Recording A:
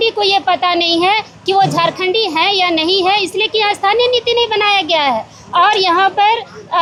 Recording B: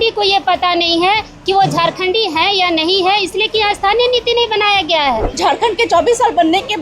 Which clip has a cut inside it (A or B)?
B